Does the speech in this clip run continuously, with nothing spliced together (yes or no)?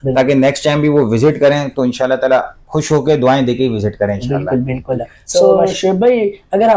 no